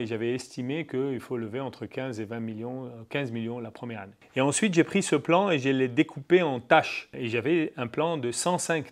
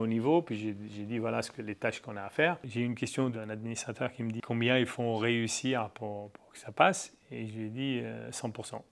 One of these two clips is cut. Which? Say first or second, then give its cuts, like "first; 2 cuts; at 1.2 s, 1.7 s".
second; 1 cut; at 3.3 s